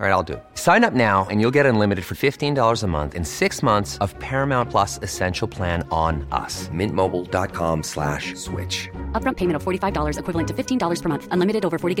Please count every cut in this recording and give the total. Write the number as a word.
zero